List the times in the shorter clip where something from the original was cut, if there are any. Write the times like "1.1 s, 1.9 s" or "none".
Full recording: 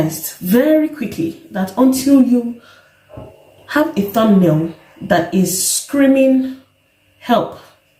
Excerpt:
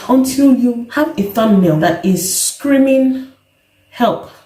0.8 s, 1.8 s